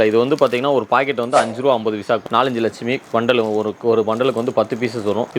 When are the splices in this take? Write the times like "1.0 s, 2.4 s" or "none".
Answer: 2.2 s